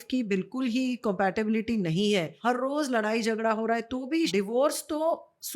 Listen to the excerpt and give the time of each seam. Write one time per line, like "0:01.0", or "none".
0:02.3
0:04.3